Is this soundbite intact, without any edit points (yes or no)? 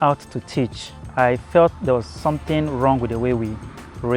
no